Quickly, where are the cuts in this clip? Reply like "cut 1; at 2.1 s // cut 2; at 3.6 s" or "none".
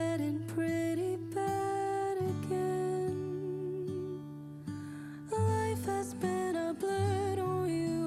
none